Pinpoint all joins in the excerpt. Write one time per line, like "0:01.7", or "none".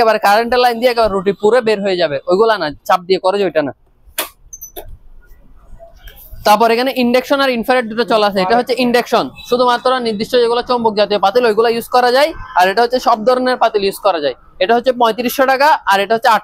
none